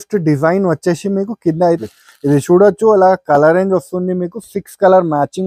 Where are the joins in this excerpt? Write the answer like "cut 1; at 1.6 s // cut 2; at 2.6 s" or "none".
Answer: cut 1; at 1.9 s